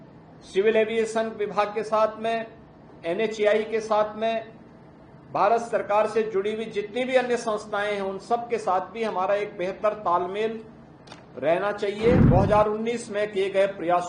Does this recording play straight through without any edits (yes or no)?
no